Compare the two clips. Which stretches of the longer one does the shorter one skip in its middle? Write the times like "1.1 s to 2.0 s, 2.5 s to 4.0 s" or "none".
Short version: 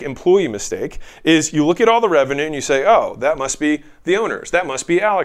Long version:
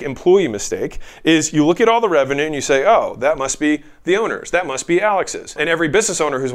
none